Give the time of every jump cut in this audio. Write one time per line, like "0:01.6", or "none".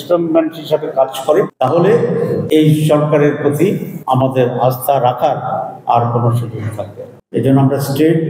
0:01.5
0:02.4
0:03.9